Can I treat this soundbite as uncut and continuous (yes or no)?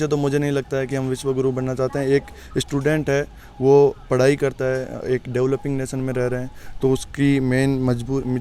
yes